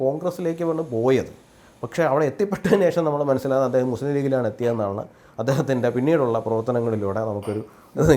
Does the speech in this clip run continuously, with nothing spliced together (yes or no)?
yes